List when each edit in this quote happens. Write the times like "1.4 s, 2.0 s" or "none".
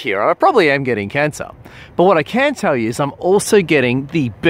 3.4 s

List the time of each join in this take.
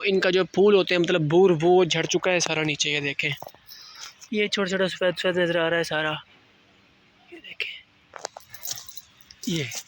none

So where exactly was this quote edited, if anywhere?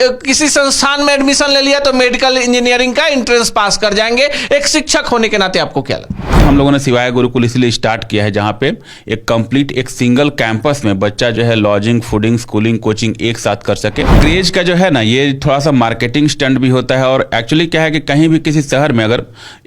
6.4 s, 14.2 s

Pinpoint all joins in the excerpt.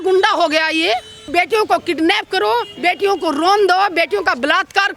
1.3 s

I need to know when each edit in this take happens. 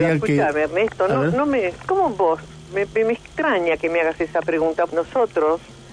4.9 s

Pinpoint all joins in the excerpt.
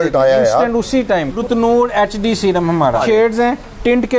1.4 s, 3.0 s

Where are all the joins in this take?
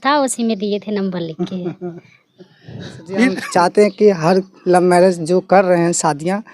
3.4 s

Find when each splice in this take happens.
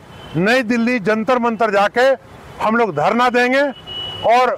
none

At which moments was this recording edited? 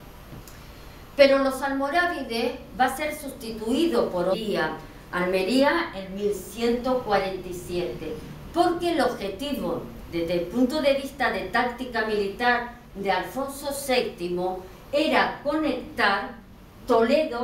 none

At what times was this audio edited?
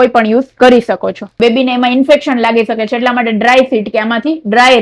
1.3 s

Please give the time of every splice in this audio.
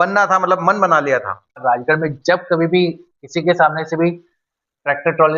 1.6 s

